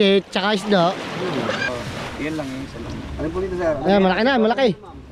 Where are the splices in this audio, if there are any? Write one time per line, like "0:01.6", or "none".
0:01.6